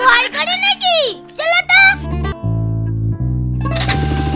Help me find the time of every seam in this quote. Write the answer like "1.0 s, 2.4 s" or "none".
2.3 s